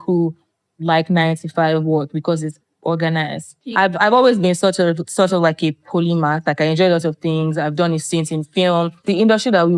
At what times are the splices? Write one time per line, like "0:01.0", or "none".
0:03.6
0:09.0